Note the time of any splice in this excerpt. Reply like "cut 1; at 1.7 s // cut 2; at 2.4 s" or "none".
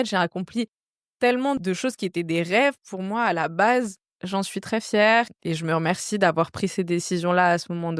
cut 1; at 1.6 s // cut 2; at 4.1 s